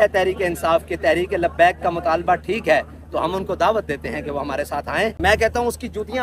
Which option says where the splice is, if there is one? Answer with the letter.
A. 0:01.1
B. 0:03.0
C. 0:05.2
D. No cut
C